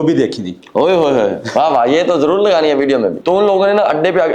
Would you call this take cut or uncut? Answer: cut